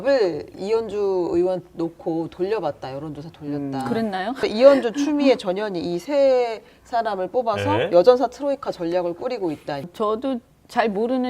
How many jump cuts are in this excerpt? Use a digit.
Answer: 2